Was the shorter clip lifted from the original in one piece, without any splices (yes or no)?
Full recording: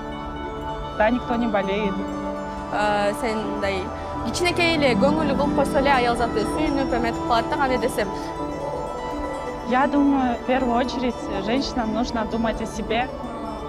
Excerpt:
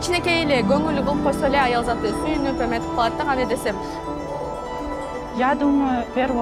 yes